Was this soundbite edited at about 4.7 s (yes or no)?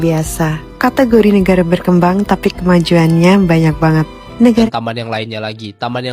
yes